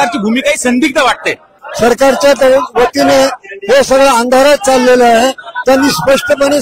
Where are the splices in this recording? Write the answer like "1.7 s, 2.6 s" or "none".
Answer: 1.6 s